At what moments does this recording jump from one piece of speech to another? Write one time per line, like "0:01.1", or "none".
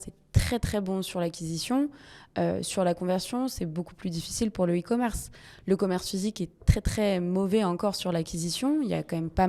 none